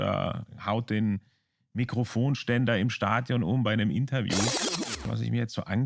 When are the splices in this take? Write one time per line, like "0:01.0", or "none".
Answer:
0:04.5